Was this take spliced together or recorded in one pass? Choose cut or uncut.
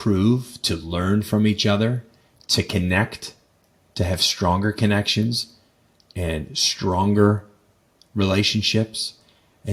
uncut